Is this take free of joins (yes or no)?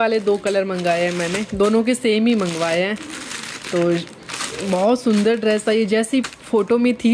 yes